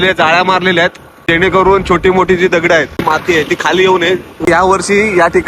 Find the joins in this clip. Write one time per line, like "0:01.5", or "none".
0:01.2
0:03.0
0:04.5